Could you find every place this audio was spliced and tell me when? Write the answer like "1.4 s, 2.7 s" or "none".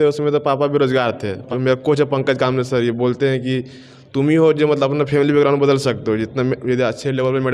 1.4 s

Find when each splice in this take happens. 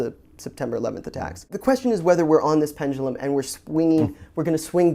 1.5 s

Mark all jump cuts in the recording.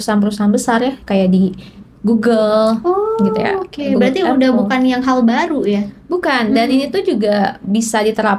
none

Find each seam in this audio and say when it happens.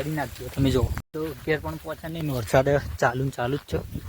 1.0 s

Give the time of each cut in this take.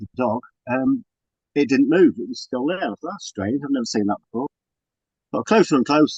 none

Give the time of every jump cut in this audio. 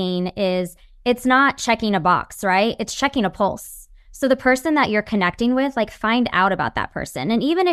none

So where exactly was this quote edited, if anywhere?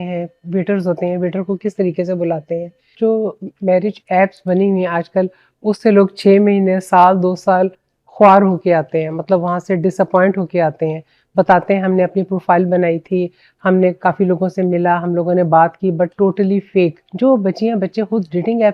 2.9 s, 17.0 s

